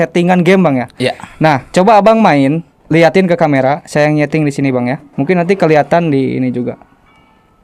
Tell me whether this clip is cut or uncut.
cut